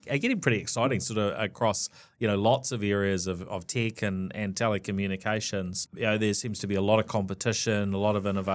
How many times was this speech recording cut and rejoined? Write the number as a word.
zero